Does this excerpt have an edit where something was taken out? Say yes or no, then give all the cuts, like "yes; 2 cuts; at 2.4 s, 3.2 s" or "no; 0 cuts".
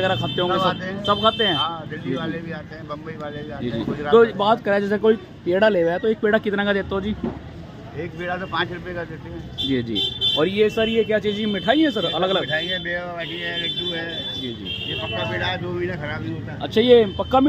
no; 0 cuts